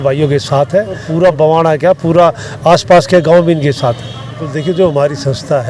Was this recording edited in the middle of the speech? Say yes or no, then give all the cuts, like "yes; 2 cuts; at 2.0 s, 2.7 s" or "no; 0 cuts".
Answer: yes; 2 cuts; at 1.1 s, 4.5 s